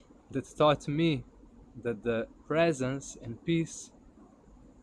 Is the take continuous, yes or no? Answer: yes